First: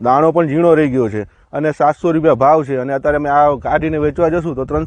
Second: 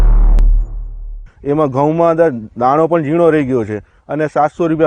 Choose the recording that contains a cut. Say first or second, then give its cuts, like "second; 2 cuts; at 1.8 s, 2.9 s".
second; 1 cut; at 1.2 s